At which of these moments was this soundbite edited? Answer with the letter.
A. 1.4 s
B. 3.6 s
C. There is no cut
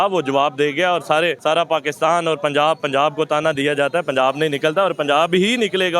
A